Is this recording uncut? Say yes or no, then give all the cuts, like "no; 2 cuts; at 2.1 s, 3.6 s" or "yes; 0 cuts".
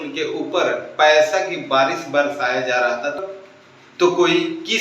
no; 1 cut; at 3.2 s